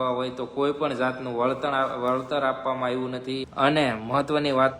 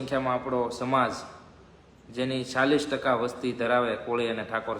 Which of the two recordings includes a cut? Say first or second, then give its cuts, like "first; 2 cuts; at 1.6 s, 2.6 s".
first; 1 cut; at 3.5 s